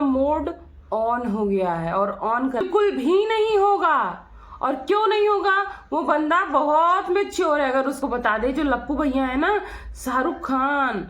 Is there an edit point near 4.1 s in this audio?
no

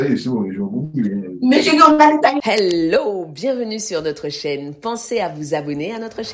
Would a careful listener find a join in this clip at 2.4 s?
yes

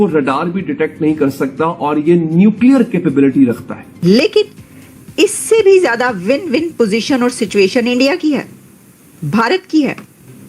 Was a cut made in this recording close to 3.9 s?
yes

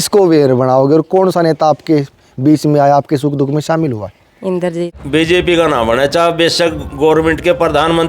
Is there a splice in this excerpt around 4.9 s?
yes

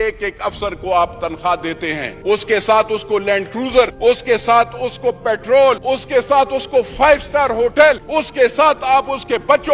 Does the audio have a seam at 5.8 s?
yes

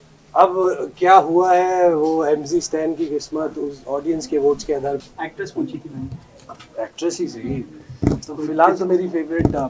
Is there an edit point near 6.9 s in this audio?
no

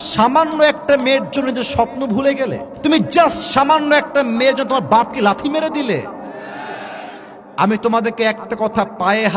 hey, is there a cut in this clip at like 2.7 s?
yes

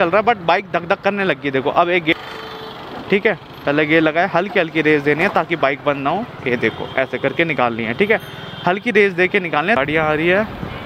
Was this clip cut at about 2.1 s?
yes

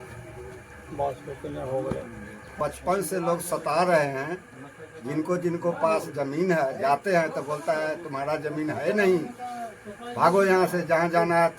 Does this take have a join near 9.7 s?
no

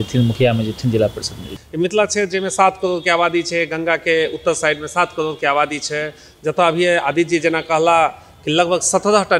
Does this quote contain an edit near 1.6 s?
yes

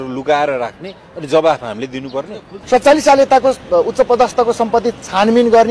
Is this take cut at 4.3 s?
no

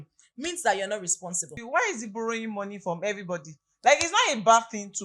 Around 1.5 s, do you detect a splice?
yes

